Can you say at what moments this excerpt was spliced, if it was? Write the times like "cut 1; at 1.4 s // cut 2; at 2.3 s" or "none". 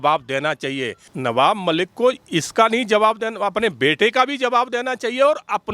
cut 1; at 1.1 s